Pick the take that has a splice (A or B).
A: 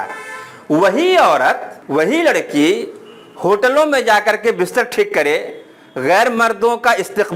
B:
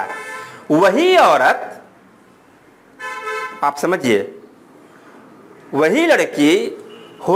A